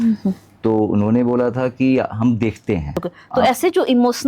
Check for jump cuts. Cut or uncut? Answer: cut